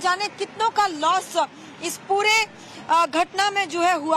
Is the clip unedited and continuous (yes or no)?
no